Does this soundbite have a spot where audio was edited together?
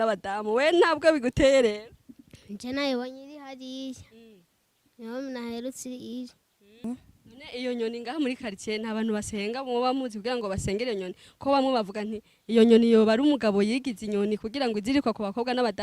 yes; 1 cut; at 6.8 s

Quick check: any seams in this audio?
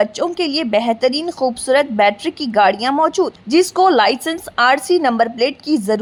no; 0 cuts

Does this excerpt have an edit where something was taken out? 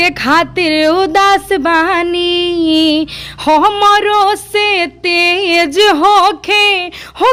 no; 0 cuts

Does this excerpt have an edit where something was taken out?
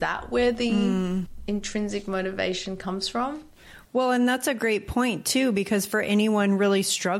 yes; 1 cut; at 1.4 s

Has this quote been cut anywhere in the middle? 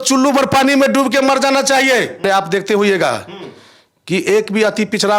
yes; 1 cut; at 2.1 s

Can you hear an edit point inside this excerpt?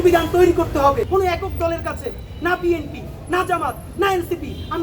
yes; 1 cut; at 1.0 s

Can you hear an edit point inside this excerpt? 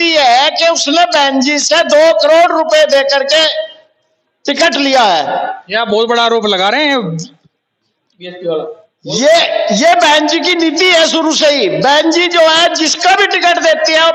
no; 0 cuts

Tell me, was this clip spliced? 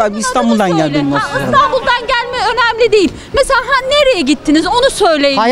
no; 0 cuts

